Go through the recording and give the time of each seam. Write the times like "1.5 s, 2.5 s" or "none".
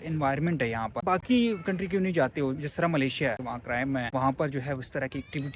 1.0 s, 3.4 s